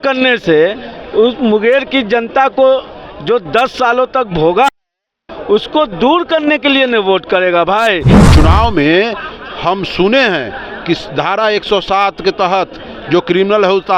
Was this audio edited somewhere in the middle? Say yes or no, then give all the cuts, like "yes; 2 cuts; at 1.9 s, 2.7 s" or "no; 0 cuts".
yes; 1 cut; at 8.2 s